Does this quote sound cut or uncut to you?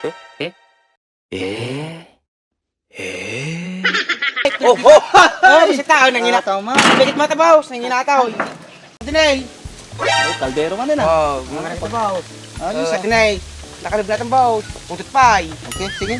cut